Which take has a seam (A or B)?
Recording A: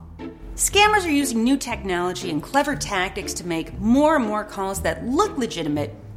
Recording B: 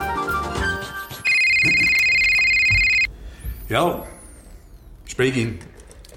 B